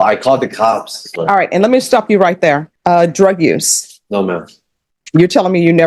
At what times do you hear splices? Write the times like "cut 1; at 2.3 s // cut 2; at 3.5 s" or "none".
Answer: cut 1; at 1.0 s // cut 2; at 2.7 s